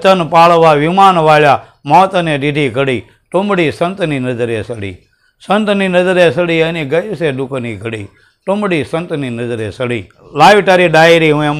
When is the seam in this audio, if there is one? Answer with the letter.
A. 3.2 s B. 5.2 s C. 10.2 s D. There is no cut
C